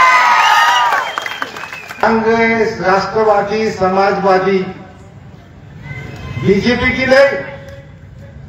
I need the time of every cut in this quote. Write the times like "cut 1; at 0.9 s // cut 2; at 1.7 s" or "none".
cut 1; at 2.0 s